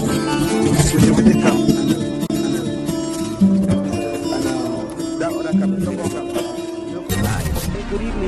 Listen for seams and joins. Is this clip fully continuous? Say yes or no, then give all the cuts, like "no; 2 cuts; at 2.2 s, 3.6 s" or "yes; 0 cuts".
no; 1 cut; at 7.1 s